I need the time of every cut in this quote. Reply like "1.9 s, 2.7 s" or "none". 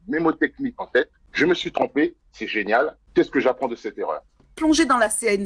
1.2 s, 3.0 s, 4.5 s